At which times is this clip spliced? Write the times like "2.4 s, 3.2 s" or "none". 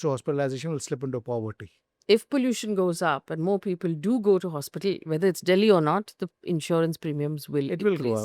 1.9 s